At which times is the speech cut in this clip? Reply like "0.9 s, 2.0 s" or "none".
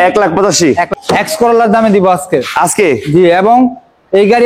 0.9 s